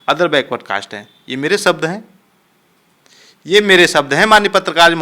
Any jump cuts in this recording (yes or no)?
no